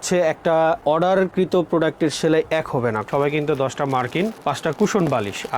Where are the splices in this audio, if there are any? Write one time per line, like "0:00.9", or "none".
0:01.0
0:03.1